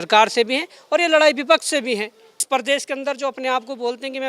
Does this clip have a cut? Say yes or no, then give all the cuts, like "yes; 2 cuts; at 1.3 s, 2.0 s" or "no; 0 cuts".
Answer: yes; 1 cut; at 2.4 s